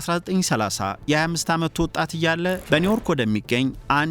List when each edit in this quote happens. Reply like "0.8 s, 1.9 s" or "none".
2.6 s